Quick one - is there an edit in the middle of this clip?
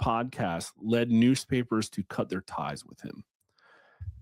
no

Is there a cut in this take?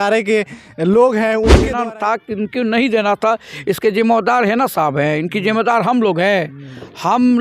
yes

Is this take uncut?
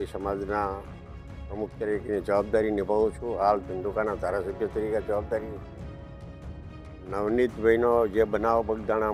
yes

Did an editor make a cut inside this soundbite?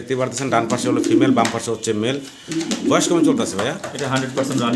no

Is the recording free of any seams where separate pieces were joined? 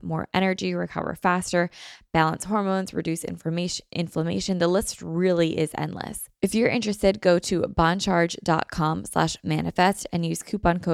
no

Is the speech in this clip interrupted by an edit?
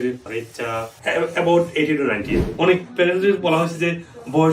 yes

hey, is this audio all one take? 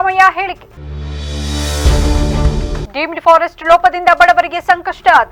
yes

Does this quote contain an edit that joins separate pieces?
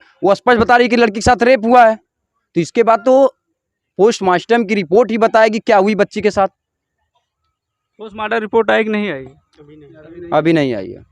no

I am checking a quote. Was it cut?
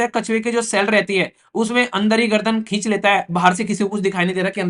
no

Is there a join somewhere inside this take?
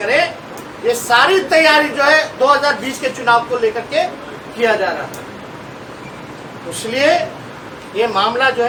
no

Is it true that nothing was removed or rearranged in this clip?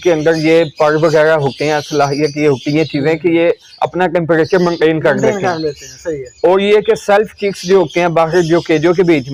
yes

